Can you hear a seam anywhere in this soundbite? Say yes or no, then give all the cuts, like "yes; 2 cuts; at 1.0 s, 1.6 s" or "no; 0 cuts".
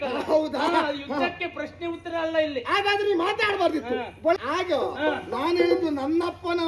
yes; 1 cut; at 4.4 s